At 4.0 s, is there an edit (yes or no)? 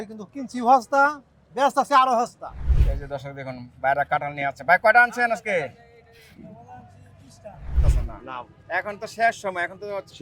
no